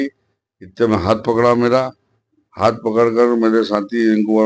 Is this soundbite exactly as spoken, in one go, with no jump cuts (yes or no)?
yes